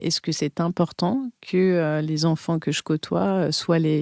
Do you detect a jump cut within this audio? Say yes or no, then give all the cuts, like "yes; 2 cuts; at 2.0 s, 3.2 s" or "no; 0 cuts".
no; 0 cuts